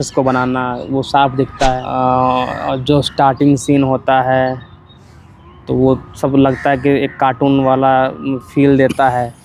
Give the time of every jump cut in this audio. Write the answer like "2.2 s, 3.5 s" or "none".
1.9 s